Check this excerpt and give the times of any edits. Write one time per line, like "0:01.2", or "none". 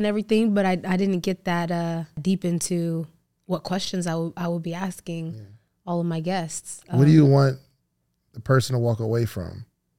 0:02.2